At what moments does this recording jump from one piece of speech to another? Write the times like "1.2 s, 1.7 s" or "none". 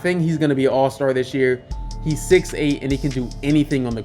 none